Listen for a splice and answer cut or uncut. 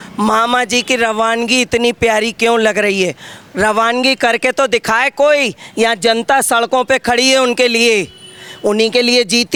uncut